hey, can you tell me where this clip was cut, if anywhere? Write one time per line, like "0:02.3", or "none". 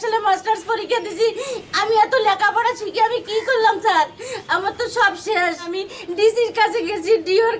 0:05.8